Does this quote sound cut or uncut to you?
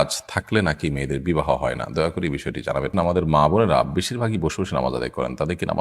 cut